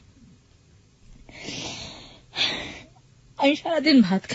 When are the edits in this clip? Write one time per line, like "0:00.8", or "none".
none